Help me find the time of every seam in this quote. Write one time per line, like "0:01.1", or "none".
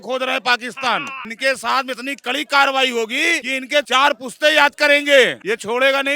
0:01.2
0:03.7
0:05.4